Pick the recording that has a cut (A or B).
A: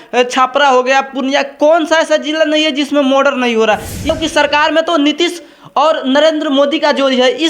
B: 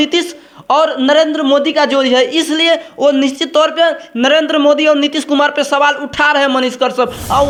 A